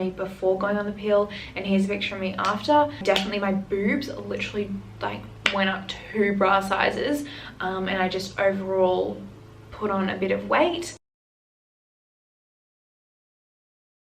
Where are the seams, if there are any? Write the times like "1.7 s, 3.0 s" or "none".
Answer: none